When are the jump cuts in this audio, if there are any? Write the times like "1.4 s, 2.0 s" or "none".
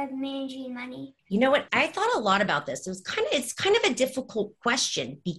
1.1 s, 1.7 s